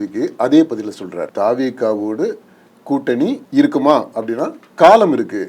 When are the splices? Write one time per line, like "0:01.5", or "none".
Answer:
0:01.3
0:03.4